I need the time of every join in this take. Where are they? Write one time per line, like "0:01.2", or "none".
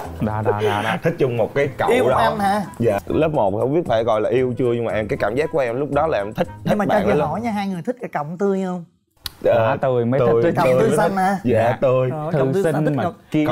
0:03.0